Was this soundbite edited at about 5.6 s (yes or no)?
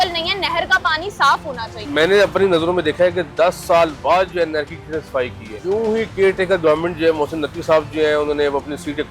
yes